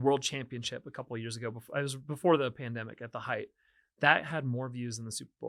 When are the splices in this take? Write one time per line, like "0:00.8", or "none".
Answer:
none